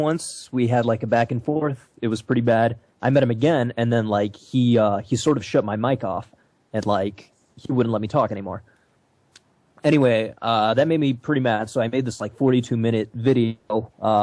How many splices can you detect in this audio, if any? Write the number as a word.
one